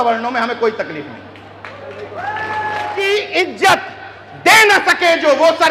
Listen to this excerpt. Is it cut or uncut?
cut